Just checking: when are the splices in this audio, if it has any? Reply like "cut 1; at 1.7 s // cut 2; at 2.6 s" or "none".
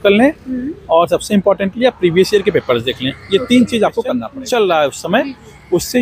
cut 1; at 4.3 s